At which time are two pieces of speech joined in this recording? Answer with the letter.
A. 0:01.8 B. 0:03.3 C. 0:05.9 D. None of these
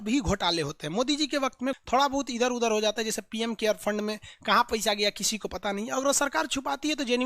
A